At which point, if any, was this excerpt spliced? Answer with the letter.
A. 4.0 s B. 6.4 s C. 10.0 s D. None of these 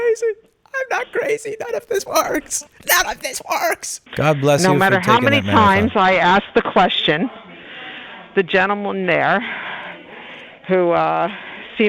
A